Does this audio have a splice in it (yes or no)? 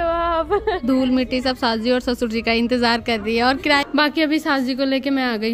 yes